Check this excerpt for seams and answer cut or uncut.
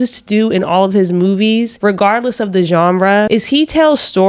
cut